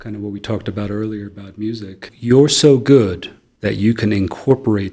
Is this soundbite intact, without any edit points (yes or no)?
no